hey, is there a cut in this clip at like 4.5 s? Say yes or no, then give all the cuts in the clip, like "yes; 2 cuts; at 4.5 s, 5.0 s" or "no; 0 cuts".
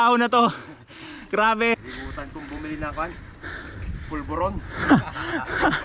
no; 1 cut; at 1.7 s